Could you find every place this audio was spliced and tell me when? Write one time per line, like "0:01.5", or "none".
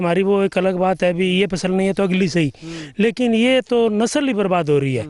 none